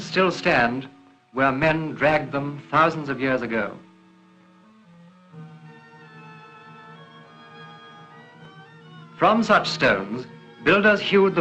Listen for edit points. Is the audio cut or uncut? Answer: cut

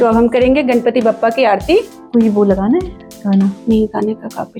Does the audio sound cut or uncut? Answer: uncut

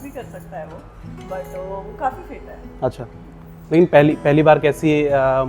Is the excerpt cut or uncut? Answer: uncut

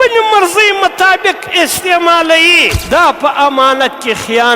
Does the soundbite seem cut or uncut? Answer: cut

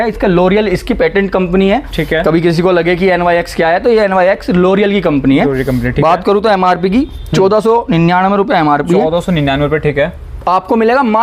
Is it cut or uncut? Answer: uncut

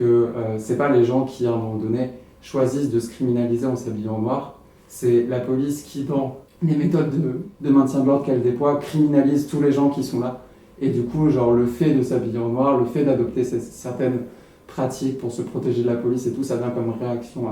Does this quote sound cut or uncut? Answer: cut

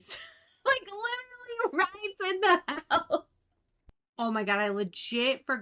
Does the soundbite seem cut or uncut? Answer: cut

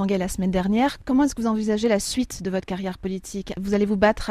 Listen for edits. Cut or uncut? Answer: cut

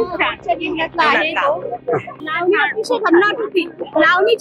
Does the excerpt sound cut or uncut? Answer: cut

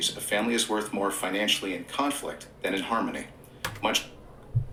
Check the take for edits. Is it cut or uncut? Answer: uncut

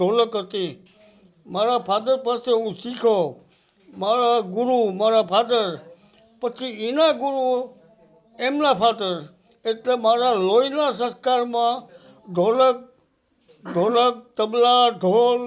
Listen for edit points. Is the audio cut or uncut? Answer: uncut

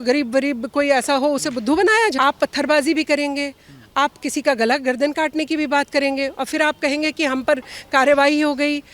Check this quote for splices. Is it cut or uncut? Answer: cut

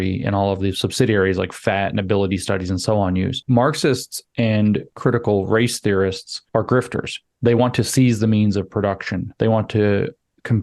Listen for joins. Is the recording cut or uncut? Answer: cut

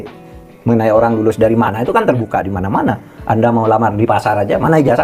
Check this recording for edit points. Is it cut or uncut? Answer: uncut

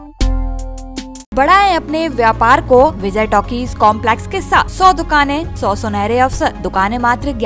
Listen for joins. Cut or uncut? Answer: cut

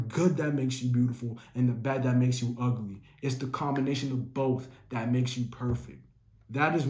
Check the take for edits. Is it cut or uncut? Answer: uncut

